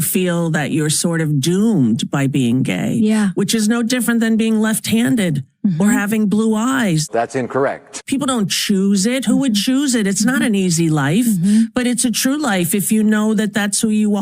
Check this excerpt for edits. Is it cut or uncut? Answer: cut